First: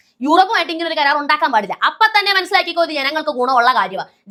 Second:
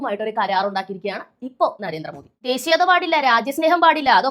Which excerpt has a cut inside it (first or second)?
second